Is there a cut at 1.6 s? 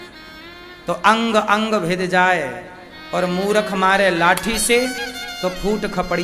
no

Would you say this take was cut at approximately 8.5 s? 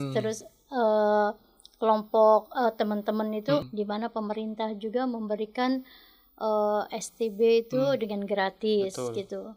no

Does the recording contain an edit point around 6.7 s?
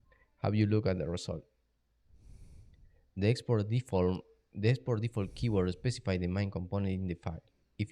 yes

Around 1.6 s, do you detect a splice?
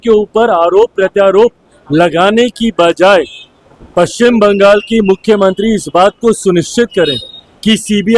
no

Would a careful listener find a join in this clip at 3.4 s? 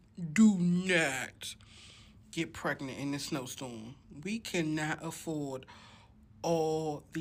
no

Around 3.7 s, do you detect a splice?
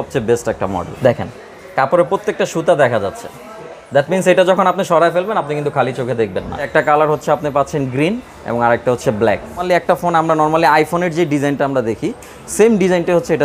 no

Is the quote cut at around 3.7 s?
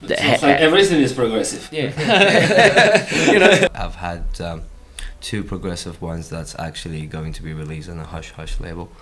yes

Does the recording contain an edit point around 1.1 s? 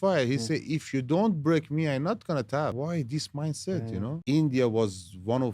no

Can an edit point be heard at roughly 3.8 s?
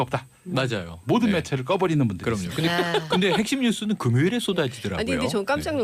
no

